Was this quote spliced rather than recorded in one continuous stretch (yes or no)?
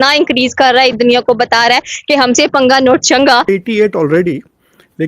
yes